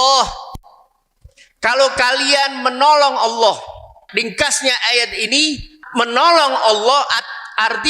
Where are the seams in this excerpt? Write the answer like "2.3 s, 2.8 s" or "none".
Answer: 4.0 s, 5.8 s

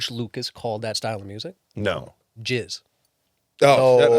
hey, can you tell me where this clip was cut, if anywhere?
1.0 s, 2.2 s

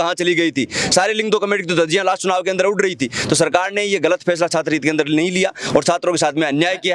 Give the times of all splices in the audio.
none

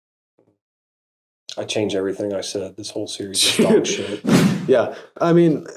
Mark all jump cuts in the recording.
4.2 s

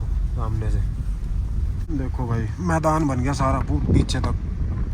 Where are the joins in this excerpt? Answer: 1.8 s

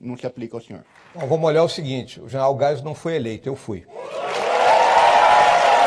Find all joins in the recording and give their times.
1.0 s, 3.9 s

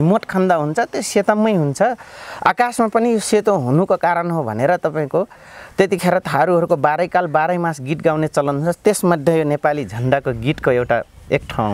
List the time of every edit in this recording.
none

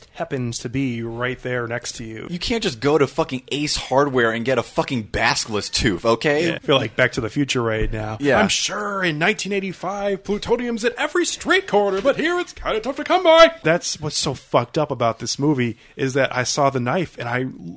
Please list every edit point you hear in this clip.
2.2 s, 6.6 s, 13.6 s

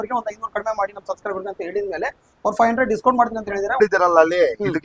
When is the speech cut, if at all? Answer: 3.8 s

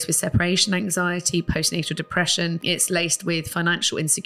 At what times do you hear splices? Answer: 2.6 s

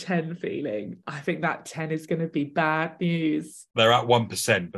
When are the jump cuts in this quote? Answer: 3.6 s

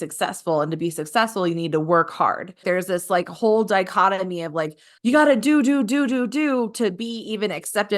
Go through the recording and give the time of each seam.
2.6 s

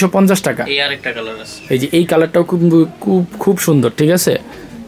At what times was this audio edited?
none

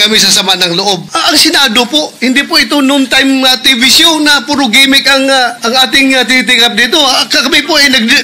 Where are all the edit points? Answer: 1.1 s, 5.6 s

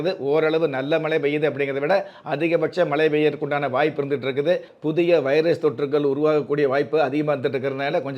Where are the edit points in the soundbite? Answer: 4.7 s

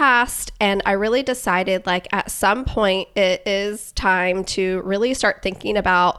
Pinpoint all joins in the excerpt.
none

